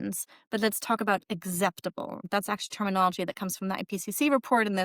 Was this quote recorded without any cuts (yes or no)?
no